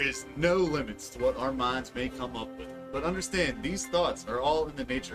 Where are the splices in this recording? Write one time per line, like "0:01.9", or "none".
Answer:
none